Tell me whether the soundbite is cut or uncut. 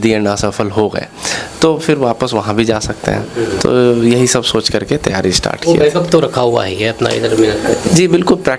uncut